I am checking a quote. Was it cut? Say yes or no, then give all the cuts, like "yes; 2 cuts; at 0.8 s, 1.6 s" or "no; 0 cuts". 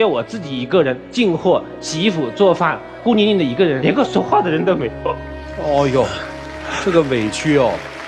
no; 0 cuts